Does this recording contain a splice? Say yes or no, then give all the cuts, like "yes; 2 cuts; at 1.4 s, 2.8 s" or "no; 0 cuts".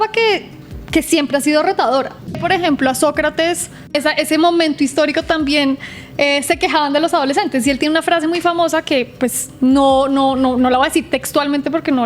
yes; 2 cuts; at 2.4 s, 3.9 s